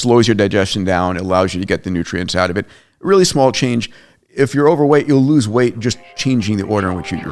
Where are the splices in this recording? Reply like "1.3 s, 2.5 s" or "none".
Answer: none